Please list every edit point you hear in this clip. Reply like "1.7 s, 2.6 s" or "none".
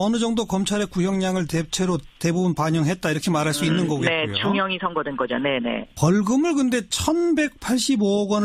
2.1 s